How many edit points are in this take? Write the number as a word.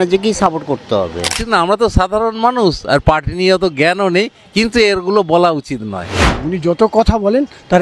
two